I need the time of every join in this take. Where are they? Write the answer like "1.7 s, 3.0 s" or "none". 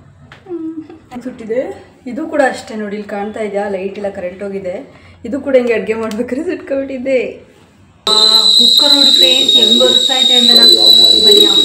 1.1 s, 8.1 s